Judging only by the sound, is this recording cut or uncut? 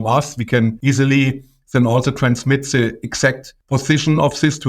cut